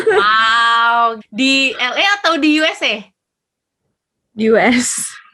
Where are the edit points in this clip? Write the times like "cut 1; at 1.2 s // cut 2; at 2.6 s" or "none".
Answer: cut 1; at 1.2 s